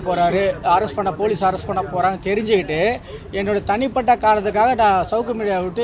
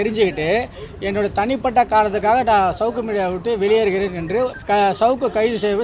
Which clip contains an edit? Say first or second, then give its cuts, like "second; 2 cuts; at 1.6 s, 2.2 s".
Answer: second; 1 cut; at 4.6 s